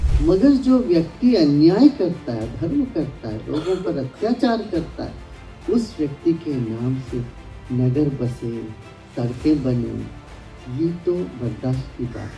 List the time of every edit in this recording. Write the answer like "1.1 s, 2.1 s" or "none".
none